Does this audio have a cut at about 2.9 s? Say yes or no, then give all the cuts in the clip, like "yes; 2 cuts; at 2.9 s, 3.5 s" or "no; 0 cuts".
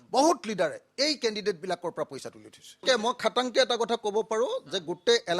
yes; 1 cut; at 2.9 s